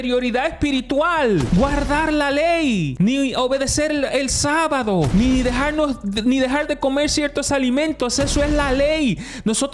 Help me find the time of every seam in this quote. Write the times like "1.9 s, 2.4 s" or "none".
1.5 s, 2.9 s, 5.1 s